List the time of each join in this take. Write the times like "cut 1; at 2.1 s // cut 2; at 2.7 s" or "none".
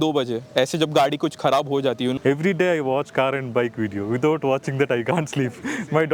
cut 1; at 2.2 s

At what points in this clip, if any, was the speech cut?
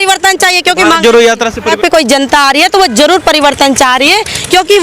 cut 1; at 1.8 s

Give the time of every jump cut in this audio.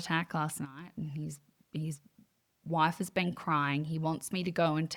none

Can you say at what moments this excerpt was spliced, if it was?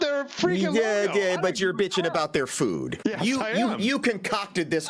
cut 1; at 2.9 s

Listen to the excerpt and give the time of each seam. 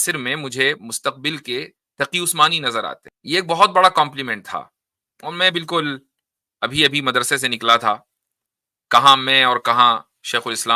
cut 1; at 3.1 s

